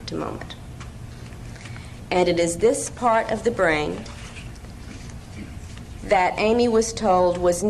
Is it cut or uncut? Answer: cut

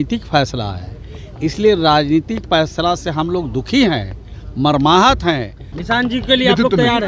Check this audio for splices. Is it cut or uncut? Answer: cut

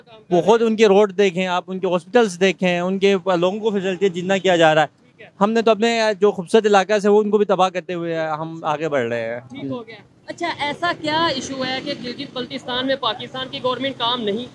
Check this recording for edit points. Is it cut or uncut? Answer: uncut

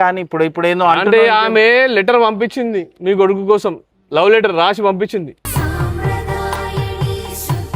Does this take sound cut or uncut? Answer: uncut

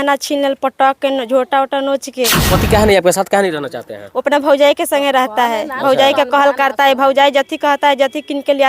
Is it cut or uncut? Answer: cut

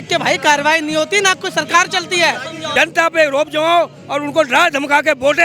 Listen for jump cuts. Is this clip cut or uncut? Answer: cut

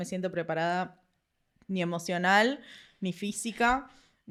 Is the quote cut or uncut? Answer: uncut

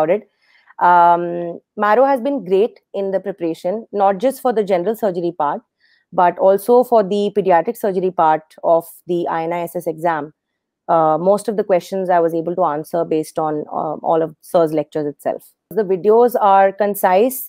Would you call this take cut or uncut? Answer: cut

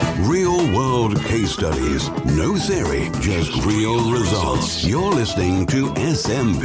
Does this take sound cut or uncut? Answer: uncut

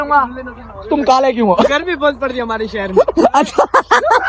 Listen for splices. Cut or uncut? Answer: cut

